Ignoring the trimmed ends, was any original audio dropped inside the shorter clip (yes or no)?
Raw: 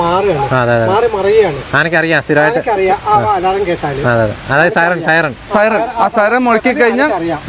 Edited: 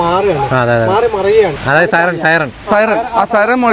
yes